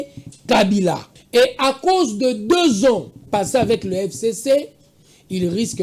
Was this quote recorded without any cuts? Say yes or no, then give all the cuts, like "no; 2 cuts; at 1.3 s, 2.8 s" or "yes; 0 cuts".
no; 1 cut; at 1.1 s